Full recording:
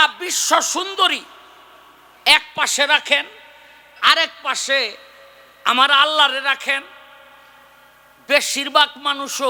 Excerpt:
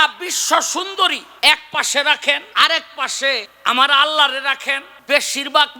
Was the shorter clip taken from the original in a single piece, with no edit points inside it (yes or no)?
no